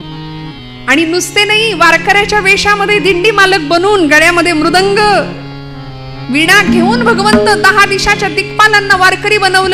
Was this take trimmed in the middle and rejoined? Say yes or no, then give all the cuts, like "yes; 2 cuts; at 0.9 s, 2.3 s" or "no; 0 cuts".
no; 0 cuts